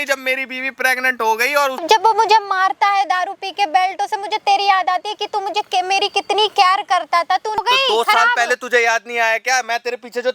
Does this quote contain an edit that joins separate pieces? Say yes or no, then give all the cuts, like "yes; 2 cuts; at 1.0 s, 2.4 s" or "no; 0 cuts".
yes; 2 cuts; at 1.8 s, 7.6 s